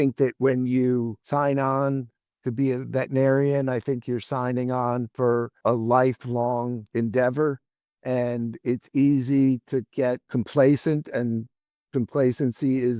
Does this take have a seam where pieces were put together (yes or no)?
no